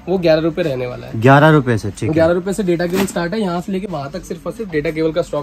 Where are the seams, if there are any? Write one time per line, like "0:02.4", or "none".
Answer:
none